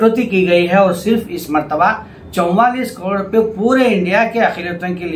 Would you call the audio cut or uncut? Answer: uncut